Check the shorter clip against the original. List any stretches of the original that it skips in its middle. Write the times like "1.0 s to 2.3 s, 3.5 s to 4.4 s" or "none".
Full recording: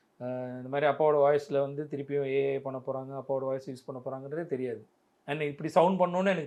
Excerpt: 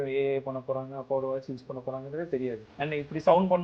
4.9 s to 5.2 s